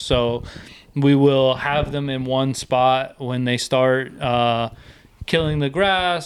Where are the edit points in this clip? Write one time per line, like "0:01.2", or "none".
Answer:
none